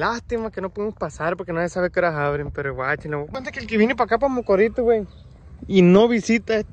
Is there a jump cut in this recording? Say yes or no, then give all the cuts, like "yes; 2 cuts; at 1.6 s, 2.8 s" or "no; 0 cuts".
yes; 1 cut; at 3.3 s